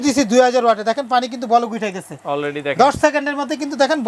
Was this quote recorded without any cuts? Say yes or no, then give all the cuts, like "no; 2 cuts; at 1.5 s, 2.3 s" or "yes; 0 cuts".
yes; 0 cuts